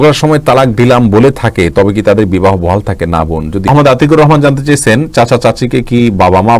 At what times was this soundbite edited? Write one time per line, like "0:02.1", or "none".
0:03.7